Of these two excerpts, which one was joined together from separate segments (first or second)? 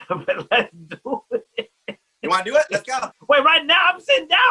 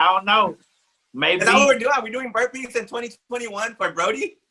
first